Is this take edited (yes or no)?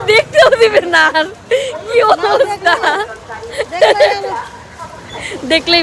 no